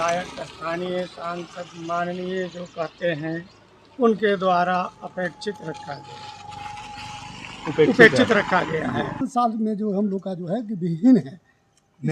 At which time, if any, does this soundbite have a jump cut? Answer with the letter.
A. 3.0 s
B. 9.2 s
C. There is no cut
B